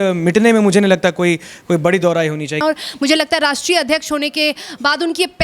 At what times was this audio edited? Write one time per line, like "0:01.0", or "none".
0:02.6